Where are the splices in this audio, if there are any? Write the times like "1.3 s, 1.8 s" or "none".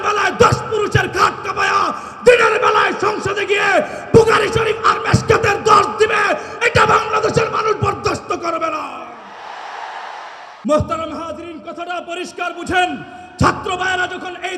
10.5 s